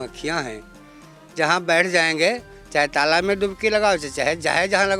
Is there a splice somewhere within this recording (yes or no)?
no